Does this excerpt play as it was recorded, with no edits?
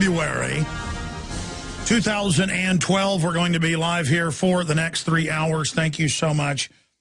no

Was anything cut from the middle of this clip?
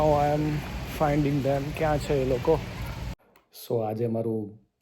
yes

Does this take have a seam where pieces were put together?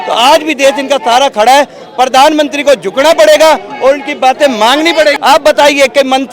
yes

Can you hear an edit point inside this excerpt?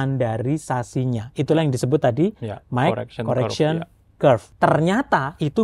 yes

